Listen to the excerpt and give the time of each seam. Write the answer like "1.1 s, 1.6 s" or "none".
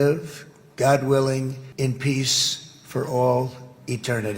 1.6 s